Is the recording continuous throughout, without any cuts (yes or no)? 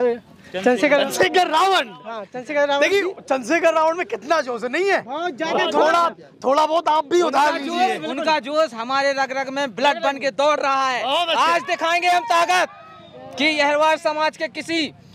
yes